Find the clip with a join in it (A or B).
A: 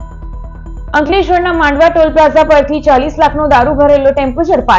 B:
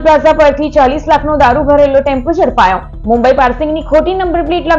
A